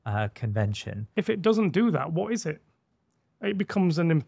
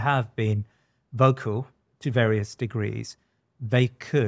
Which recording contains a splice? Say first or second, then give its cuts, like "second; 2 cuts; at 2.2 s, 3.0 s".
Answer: first; 1 cut; at 1.1 s